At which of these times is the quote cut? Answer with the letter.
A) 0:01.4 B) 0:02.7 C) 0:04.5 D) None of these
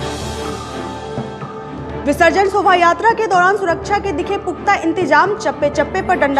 A